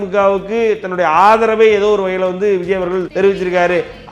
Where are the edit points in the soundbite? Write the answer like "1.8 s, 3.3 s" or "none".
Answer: 3.1 s